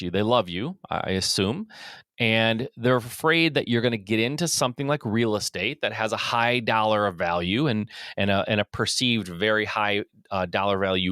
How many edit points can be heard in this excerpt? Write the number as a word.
zero